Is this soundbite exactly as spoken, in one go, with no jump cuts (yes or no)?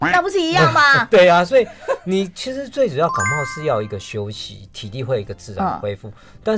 yes